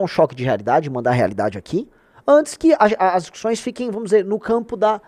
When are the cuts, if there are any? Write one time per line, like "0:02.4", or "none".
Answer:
none